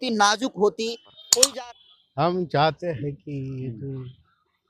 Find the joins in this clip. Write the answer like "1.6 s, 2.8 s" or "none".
1.5 s